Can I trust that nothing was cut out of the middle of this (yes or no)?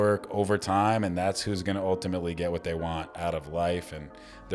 yes